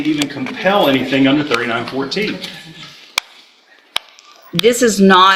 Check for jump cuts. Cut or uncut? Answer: uncut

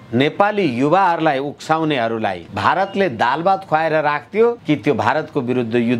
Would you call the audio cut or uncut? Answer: cut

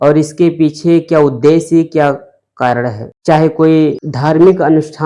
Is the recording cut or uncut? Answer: cut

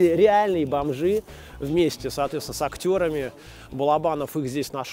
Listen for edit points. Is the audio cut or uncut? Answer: uncut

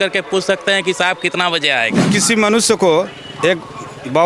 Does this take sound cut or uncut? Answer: cut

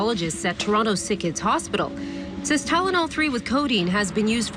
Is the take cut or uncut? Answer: uncut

